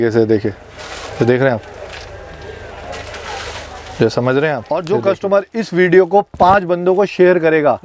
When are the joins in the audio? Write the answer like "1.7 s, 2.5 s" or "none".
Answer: 4.6 s